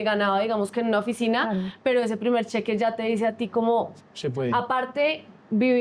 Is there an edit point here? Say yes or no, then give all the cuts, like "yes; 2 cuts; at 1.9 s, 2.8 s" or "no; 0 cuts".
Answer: no; 0 cuts